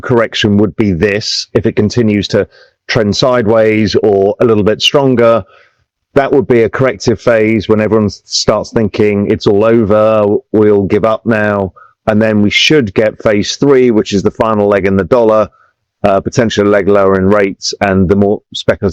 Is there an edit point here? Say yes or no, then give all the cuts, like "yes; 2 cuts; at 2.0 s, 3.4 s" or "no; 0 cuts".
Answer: no; 0 cuts